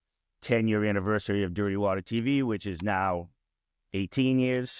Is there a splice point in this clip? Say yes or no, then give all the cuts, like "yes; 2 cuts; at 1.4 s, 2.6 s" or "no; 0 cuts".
no; 0 cuts